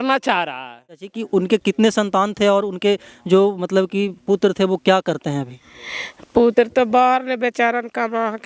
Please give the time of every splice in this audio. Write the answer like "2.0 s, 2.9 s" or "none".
1.1 s

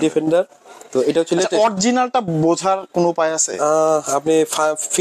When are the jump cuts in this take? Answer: none

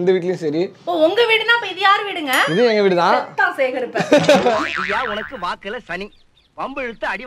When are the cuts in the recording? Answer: none

